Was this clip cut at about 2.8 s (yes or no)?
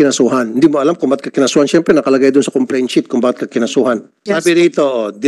no